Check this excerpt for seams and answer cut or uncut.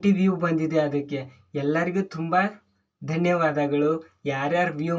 uncut